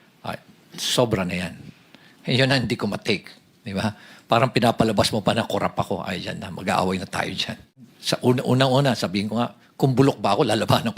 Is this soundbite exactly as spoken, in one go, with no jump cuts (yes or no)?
no